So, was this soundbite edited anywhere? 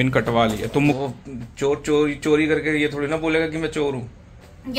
yes; 1 cut; at 1.0 s

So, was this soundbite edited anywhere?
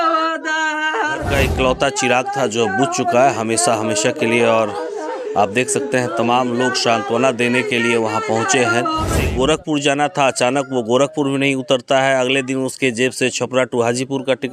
yes; 2 cuts; at 1.2 s, 9.1 s

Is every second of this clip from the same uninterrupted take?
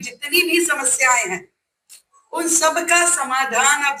yes; 0 cuts

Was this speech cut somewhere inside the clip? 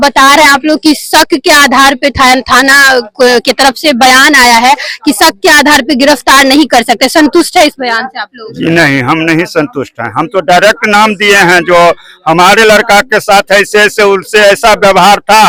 no; 0 cuts

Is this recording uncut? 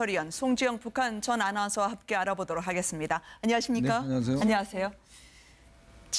no; 1 cut; at 3.3 s

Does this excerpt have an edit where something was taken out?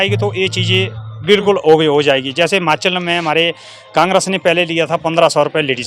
no; 0 cuts

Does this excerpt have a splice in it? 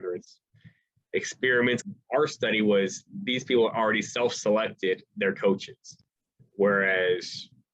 yes; 1 cut; at 1.8 s

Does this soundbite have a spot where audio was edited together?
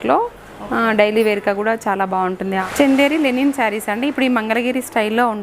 yes; 1 cut; at 2.7 s

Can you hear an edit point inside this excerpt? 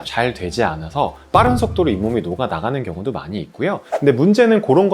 yes; 1 cut; at 3.8 s

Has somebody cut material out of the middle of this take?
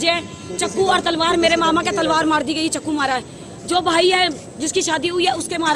no; 0 cuts

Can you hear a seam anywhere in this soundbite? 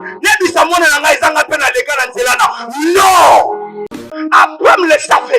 yes; 1 cut; at 4.1 s

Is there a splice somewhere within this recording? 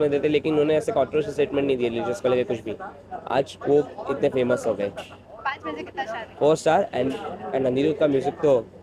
no; 0 cuts

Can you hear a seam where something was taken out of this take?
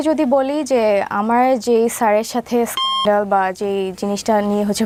no; 0 cuts

